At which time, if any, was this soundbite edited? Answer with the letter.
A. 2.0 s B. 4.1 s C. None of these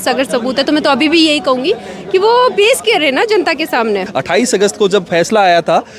B